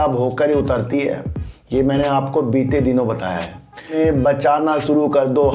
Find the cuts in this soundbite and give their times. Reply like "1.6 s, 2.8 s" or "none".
3.9 s